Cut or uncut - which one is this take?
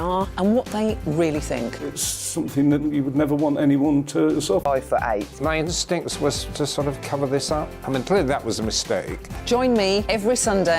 cut